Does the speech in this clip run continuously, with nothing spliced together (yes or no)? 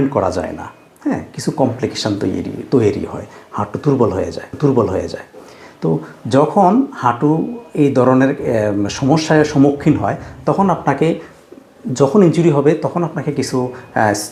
yes